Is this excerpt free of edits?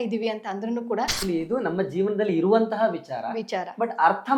no; 1 cut; at 1.2 s

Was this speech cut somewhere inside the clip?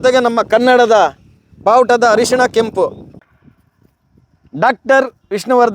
yes; 1 cut; at 3.2 s

